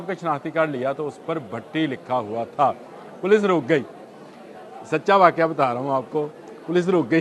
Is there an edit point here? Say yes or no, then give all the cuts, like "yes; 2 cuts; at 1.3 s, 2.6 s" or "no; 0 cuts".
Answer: no; 0 cuts